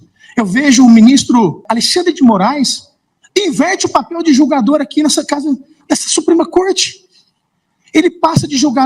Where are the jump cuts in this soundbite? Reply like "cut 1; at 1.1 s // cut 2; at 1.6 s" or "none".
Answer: cut 1; at 1.6 s